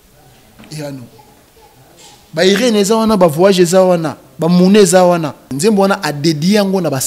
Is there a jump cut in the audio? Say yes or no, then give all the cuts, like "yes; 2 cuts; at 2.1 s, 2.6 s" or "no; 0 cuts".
yes; 1 cut; at 5.5 s